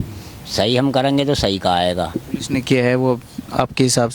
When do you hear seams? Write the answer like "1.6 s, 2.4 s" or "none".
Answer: 2.2 s